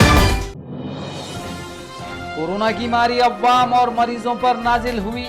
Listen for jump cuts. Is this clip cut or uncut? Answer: uncut